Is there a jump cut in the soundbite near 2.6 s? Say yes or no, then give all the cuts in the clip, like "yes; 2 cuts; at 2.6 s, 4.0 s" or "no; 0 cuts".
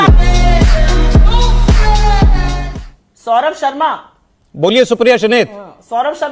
yes; 1 cut; at 2.6 s